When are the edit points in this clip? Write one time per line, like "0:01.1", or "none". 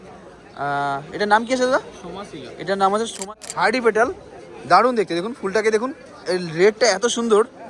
0:03.1